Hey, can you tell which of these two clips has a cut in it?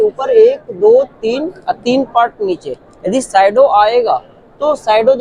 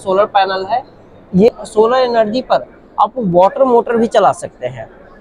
second; 1 cut; at 1.5 s

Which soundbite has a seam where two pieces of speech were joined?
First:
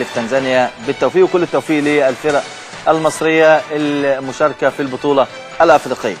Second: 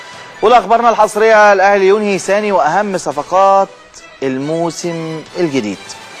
first; 1 cut; at 2.6 s

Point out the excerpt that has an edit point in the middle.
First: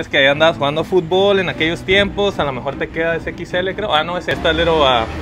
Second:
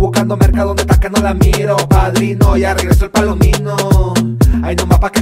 first; 1 cut; at 4.3 s

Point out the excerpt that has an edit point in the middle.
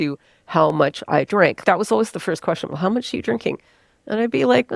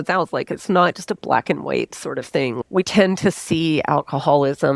first; 1 cut; at 1.6 s

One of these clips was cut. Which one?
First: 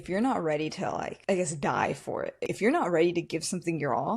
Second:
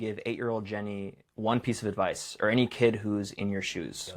first; 2 cuts; at 1.1 s, 2.5 s

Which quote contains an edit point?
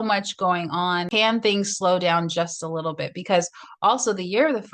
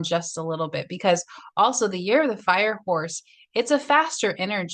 first; 1 cut; at 1.1 s

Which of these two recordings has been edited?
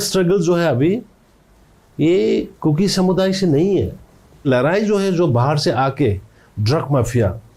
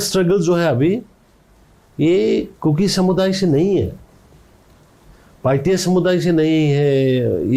first; 1 cut; at 4.5 s

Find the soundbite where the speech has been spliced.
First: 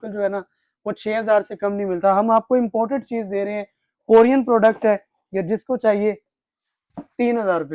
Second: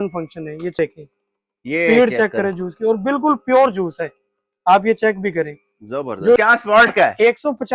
second; 2 cuts; at 0.8 s, 6.4 s

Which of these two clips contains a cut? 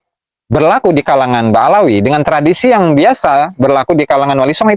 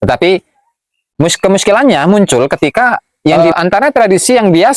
second; 1 cut; at 3.3 s

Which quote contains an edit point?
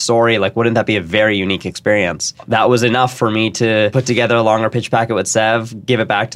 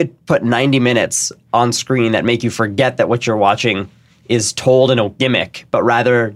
first; 2 cuts; at 2.3 s, 3.9 s

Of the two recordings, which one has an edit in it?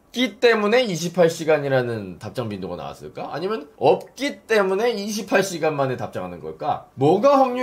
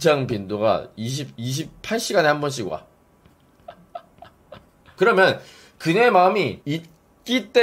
second; 1 cut; at 4.9 s

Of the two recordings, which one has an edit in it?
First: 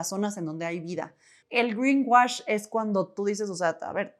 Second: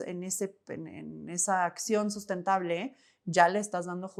first; 1 cut; at 1.3 s

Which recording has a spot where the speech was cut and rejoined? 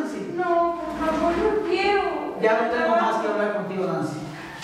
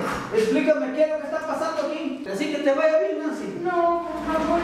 second; 1 cut; at 2.3 s

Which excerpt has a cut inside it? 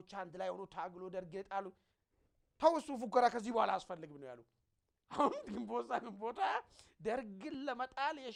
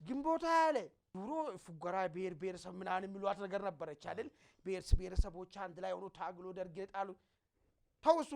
second; 1 cut; at 1.0 s

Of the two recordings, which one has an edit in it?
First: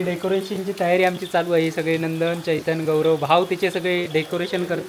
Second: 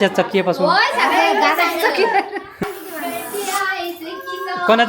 second; 1 cut; at 2.6 s

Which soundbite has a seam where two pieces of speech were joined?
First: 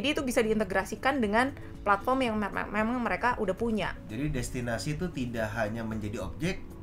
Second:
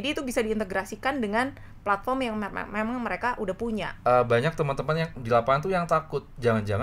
second; 1 cut; at 3.9 s

